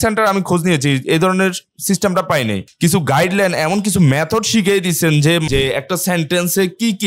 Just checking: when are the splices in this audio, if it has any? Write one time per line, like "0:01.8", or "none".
0:02.7
0:05.4

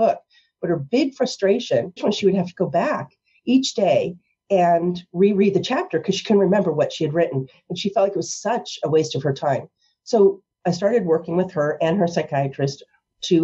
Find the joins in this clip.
0:02.0

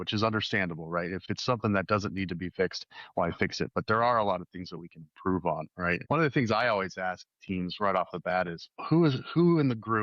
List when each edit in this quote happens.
0:01.2
0:06.0
0:08.7

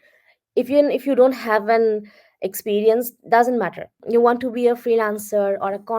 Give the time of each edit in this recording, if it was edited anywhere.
0:04.0

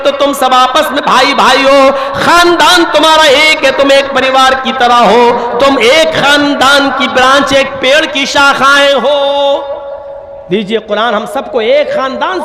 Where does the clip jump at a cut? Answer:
none

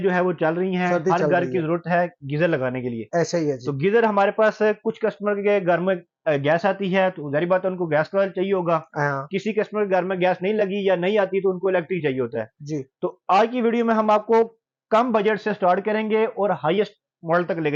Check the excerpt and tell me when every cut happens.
none

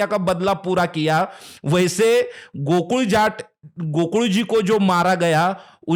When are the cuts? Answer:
none

